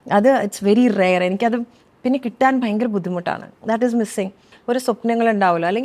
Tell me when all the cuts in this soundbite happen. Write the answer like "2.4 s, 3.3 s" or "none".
4.5 s